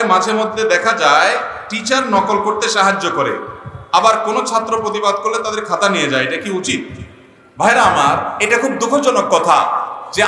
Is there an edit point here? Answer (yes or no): no